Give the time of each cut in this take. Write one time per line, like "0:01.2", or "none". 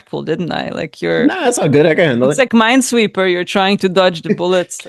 none